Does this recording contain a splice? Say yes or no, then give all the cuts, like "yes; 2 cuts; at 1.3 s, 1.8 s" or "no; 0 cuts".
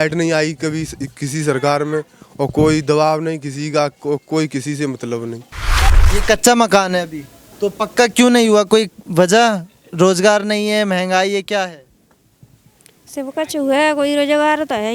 yes; 1 cut; at 5.9 s